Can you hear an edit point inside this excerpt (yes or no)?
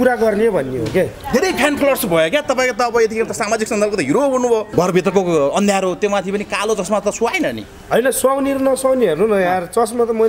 yes